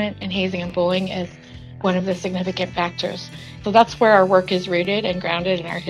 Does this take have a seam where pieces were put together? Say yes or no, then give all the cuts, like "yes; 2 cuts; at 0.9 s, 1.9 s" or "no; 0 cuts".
yes; 2 cuts; at 1.6 s, 3.6 s